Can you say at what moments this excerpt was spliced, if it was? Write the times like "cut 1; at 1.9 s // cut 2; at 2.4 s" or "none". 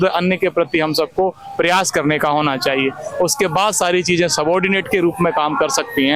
none